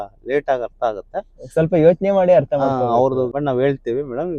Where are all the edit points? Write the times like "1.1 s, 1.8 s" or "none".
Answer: 3.3 s